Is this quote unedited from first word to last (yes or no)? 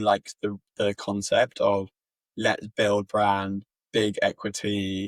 yes